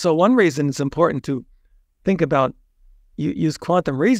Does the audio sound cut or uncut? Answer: uncut